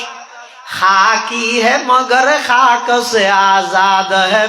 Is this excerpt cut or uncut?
uncut